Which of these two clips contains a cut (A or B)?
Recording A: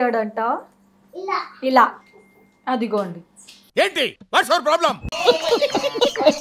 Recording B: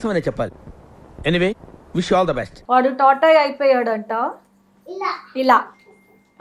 B